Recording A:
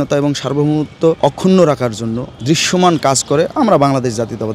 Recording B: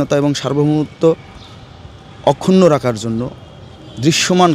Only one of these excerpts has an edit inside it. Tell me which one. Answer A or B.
A